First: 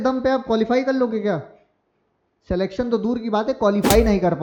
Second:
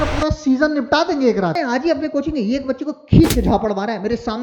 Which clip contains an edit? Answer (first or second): second